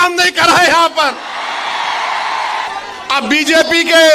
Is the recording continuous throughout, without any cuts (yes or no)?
no